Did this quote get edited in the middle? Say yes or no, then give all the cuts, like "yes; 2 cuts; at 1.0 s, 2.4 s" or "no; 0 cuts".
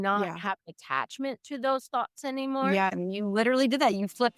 yes; 1 cut; at 2.7 s